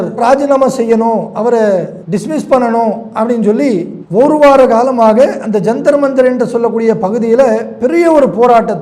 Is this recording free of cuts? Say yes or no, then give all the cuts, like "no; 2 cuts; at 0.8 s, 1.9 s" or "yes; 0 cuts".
yes; 0 cuts